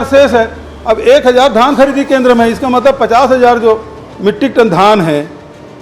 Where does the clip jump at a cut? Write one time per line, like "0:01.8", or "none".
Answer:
none